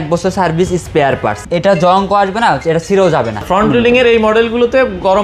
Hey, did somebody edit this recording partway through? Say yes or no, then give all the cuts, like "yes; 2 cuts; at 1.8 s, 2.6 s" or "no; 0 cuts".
yes; 2 cuts; at 1.4 s, 3.4 s